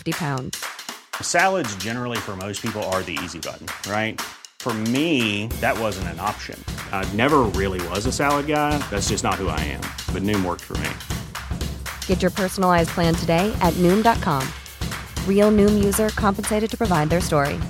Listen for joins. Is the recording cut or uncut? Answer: uncut